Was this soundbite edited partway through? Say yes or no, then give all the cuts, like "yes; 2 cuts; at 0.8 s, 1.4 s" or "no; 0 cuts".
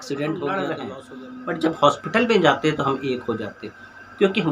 yes; 1 cut; at 1.0 s